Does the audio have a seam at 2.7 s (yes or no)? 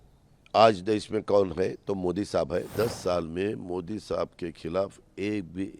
yes